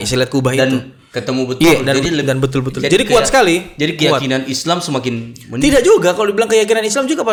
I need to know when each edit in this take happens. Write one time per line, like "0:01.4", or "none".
none